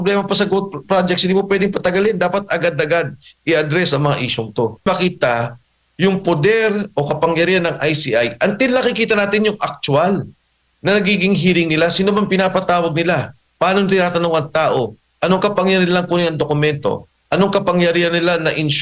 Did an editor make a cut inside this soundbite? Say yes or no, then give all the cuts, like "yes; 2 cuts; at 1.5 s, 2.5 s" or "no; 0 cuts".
yes; 1 cut; at 4.9 s